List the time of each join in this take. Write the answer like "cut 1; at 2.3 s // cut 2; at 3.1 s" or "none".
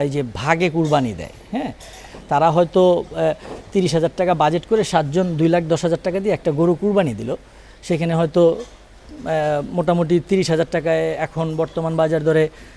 none